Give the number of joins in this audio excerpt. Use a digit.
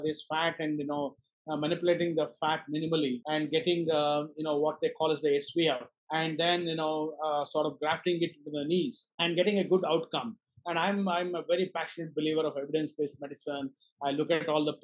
3